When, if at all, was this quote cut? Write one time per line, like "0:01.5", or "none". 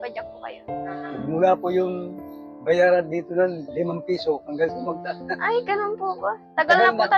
none

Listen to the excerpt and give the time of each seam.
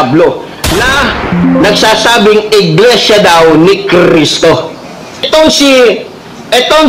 none

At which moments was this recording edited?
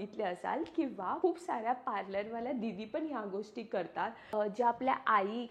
0:04.3

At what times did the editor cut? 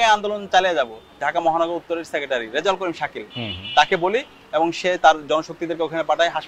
0:01.1

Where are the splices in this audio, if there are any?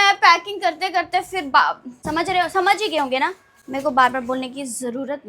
0:01.9

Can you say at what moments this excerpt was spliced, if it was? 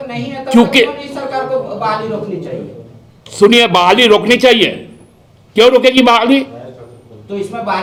none

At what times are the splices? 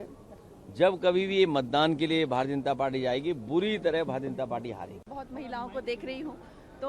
none

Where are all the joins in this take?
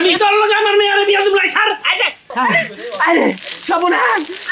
0:02.2

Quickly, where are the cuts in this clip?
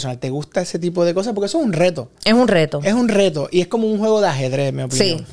none

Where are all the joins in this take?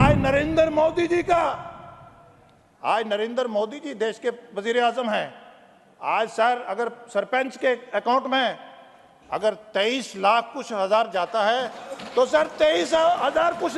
none

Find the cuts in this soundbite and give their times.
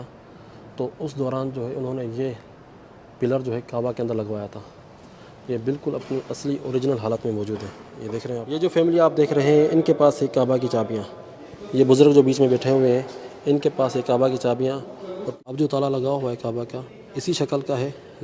0:08.4
0:15.2

